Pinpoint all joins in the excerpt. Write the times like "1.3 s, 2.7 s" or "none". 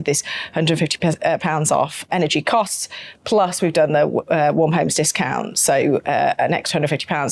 2.1 s